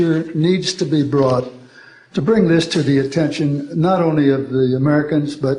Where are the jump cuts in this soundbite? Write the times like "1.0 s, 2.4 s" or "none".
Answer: none